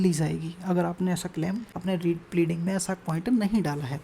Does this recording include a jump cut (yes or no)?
yes